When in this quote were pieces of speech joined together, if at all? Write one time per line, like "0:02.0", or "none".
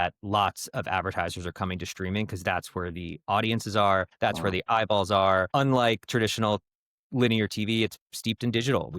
0:04.1
0:05.5